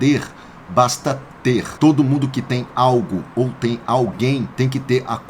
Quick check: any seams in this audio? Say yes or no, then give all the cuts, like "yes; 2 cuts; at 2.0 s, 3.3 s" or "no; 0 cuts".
yes; 2 cuts; at 1.7 s, 4.5 s